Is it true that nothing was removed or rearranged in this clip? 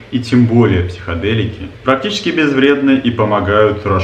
yes; 0 cuts

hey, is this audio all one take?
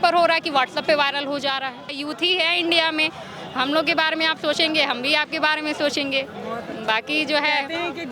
no; 1 cut; at 1.9 s

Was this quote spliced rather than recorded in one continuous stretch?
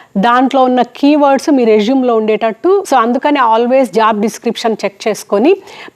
yes; 1 cut; at 2.8 s

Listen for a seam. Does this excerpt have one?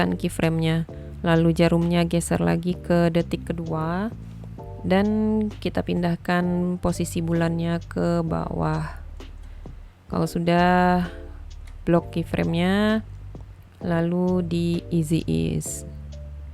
yes; 1 cut; at 15.6 s

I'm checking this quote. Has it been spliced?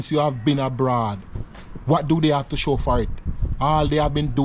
no; 0 cuts

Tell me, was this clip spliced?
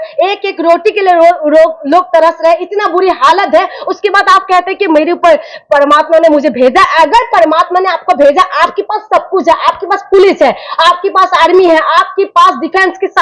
yes; 1 cut; at 1.4 s

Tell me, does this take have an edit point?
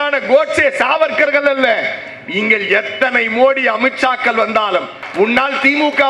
yes; 1 cut; at 5.0 s

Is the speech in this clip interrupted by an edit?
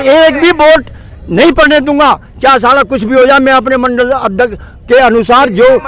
no; 0 cuts

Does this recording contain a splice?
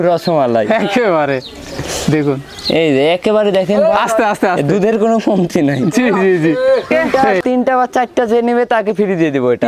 yes; 1 cut; at 6.9 s

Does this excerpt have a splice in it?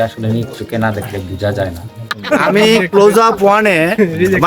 yes; 1 cut; at 2.1 s

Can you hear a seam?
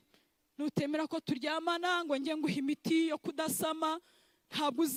no; 0 cuts

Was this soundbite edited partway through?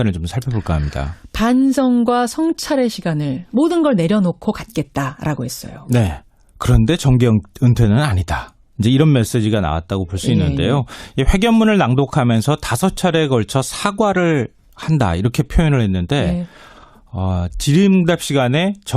no; 0 cuts

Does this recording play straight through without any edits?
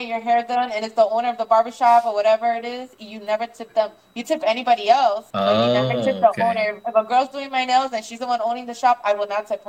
no; 1 cut; at 5.3 s

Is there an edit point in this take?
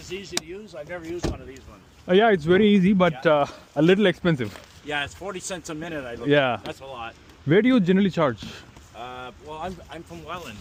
no; 0 cuts

